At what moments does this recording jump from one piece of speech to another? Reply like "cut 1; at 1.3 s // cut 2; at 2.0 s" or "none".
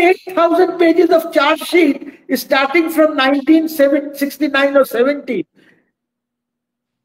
none